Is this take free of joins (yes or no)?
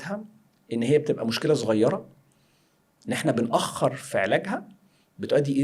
yes